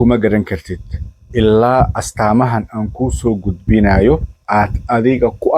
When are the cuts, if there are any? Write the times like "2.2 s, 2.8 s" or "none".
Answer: 4.3 s